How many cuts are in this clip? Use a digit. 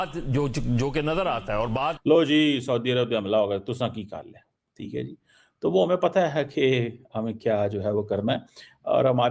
1